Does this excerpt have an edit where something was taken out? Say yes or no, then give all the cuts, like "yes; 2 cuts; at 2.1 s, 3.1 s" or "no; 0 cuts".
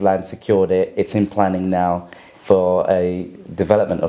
no; 0 cuts